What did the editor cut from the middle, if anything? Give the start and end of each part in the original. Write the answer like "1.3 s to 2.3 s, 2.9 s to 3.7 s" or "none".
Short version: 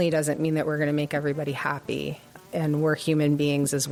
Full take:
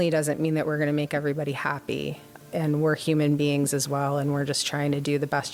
none